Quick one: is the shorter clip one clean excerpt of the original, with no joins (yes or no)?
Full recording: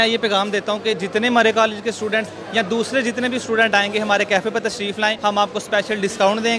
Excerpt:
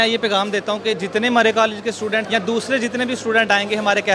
no